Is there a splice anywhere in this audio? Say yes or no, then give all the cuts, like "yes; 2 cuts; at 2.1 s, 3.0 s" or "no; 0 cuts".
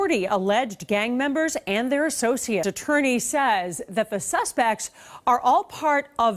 yes; 1 cut; at 2.6 s